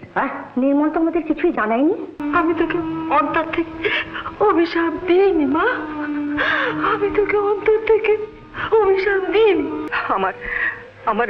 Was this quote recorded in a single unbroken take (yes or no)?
no